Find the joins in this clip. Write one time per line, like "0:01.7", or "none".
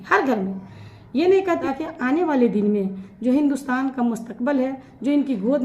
0:01.6